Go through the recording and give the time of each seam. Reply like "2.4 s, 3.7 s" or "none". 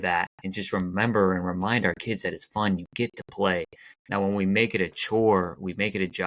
none